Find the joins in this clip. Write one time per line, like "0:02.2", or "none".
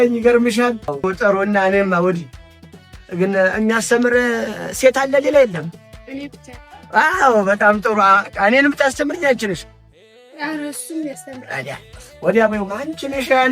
0:00.9

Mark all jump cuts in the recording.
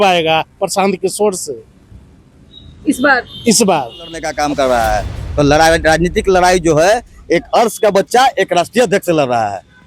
0:04.2

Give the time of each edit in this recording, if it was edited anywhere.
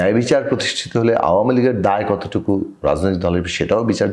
none

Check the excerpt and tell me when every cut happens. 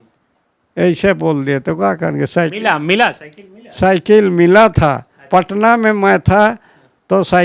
none

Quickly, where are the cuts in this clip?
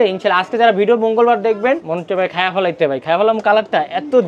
0:01.9

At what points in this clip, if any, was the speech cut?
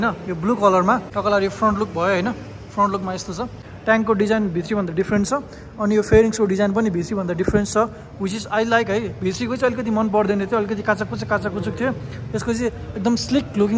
0:01.1
0:03.6

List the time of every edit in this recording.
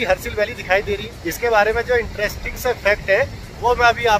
none

